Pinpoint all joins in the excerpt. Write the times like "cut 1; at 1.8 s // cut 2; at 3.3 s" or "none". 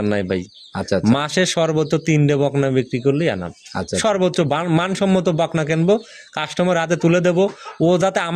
none